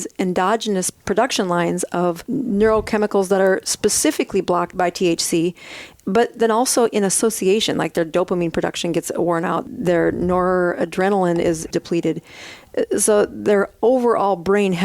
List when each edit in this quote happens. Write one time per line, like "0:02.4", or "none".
0:00.9
0:02.2
0:04.7
0:09.6
0:11.7